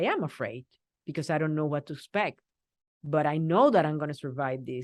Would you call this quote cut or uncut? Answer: uncut